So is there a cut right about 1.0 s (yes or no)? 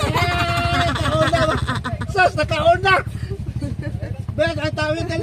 no